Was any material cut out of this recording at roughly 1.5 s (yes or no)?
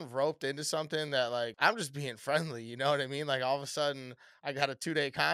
yes